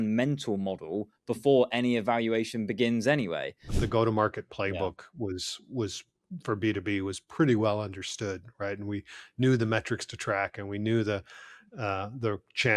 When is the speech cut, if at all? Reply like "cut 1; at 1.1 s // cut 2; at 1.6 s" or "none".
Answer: cut 1; at 3.7 s